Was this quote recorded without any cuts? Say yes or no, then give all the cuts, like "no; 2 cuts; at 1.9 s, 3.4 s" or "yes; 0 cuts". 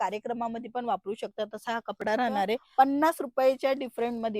no; 1 cut; at 2.7 s